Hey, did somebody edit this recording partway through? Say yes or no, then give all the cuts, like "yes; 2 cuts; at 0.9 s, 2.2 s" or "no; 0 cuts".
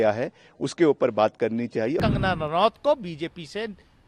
yes; 1 cut; at 2.0 s